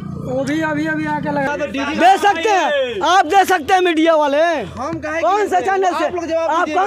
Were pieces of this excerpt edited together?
yes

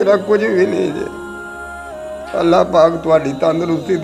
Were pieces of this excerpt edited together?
yes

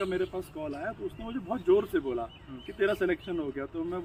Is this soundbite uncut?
yes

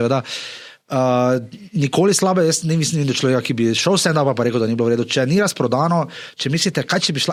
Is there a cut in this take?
no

